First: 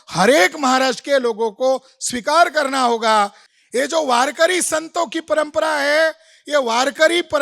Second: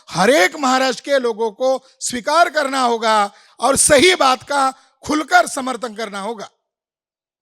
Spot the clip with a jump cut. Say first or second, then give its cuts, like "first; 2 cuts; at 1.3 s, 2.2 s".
first; 1 cut; at 3.4 s